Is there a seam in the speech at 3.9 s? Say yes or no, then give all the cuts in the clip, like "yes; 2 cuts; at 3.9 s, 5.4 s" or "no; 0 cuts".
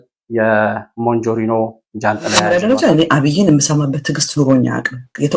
no; 1 cut; at 2.5 s